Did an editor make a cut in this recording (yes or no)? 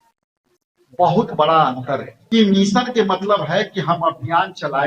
yes